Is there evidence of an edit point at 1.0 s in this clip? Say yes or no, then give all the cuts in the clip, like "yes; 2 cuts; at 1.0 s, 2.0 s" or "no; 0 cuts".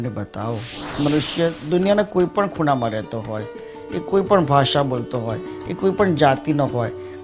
yes; 1 cut; at 1.0 s